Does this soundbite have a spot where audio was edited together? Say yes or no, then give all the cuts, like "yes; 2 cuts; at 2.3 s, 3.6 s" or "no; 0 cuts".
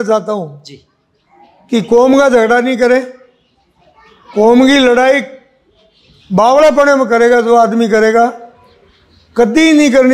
no; 0 cuts